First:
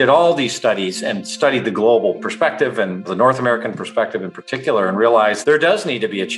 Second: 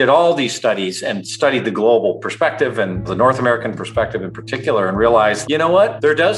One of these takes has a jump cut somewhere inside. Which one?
first; 1 cut; at 5.4 s

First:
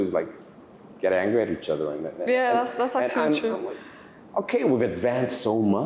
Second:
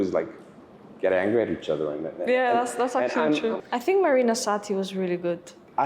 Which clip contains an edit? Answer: second; 1 cut; at 3.6 s

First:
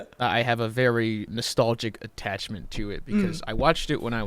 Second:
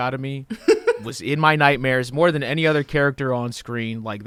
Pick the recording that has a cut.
first; 1 cut; at 1.3 s

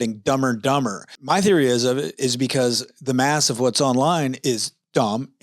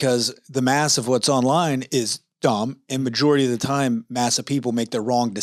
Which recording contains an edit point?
first; 1 cut; at 1.1 s

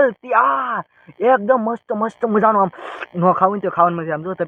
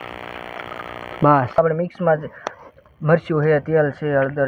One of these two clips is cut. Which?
second; 1 cut; at 1.6 s

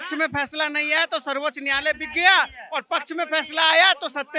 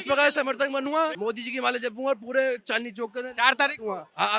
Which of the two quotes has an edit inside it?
second; 1 cut; at 1.2 s

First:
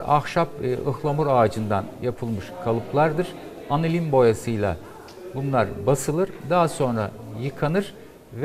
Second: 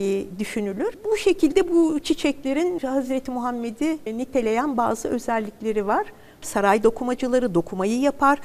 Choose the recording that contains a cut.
second; 4 cuts; at 1.0 s, 2.8 s, 4.1 s, 6.4 s

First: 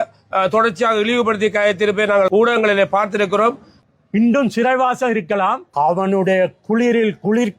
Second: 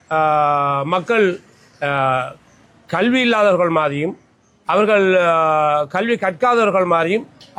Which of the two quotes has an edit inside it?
first; 1 cut; at 3.7 s

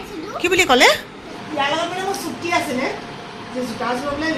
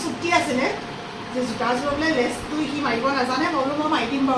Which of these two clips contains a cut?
first; 1 cut; at 1.3 s

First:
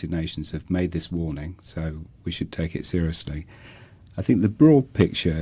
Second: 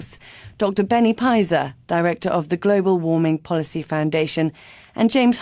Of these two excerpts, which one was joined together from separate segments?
second; 1 cut; at 3.2 s

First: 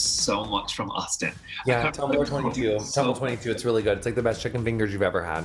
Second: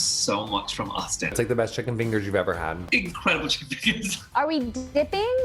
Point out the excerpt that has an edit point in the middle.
second; 3 cuts; at 1.3 s, 2.8 s, 4.2 s

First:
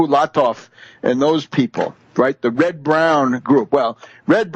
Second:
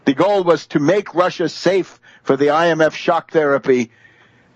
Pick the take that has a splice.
second; 1 cut; at 2.6 s

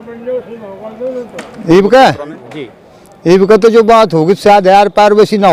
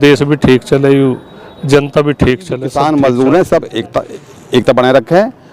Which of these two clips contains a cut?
second; 1 cut; at 2.7 s

